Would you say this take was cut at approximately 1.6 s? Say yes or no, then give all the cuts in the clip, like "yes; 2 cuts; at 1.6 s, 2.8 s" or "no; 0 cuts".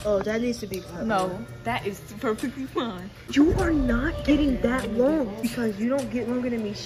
no; 2 cuts; at 3.2 s, 5.4 s